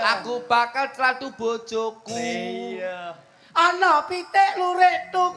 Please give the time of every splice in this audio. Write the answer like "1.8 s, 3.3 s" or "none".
none